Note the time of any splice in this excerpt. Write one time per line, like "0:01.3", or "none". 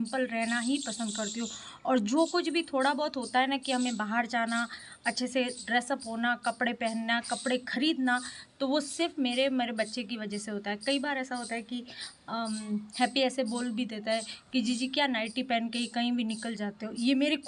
none